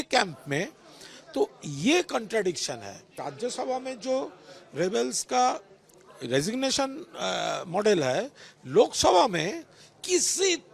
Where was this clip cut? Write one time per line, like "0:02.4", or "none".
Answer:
0:03.2

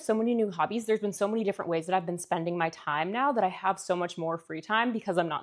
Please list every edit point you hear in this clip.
none

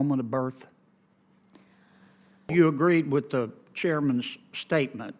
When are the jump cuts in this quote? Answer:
0:02.5

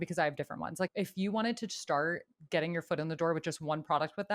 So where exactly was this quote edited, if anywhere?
0:00.9

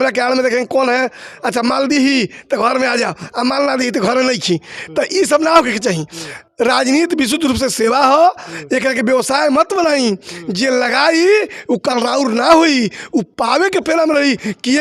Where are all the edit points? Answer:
none

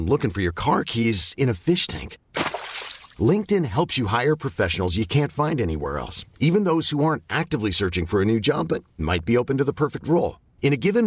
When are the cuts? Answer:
none

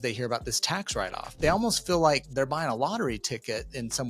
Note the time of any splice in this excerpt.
0:01.3
0:02.3

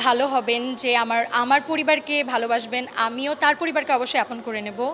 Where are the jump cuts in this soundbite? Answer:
none

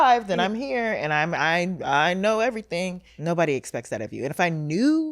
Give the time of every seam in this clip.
0:03.1

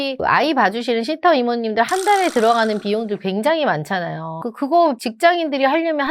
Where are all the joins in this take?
0:04.4

